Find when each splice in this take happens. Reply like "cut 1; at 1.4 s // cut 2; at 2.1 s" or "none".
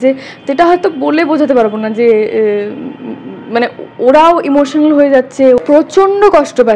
cut 1; at 5.6 s